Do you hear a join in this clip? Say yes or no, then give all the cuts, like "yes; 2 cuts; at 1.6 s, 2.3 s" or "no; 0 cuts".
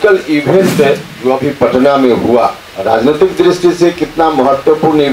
yes; 2 cuts; at 1.1 s, 2.7 s